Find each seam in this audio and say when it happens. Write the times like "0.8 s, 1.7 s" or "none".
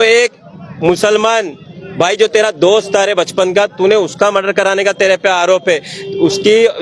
none

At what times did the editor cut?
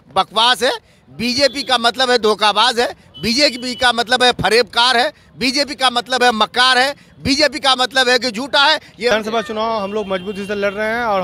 9.1 s

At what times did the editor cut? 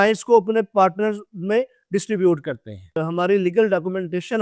3.0 s

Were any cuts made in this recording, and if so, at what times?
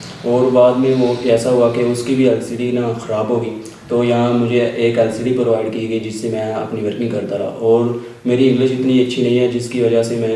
none

